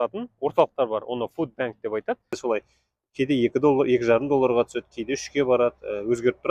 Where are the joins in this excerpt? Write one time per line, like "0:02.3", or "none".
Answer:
0:02.3